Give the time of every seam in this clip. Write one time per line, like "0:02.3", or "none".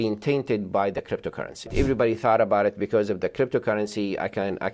0:01.7